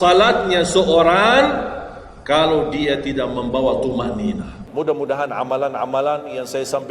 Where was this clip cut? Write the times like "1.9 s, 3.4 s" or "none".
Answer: 4.6 s